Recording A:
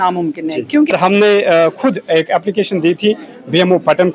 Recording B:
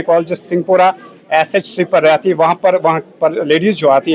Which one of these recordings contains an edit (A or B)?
A